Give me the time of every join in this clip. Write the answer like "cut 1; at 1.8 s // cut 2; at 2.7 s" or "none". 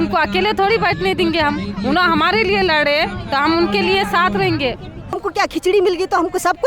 cut 1; at 5.2 s